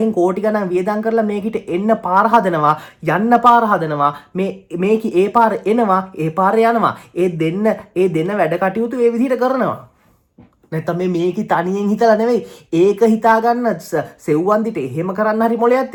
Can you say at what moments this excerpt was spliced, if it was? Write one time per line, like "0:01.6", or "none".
none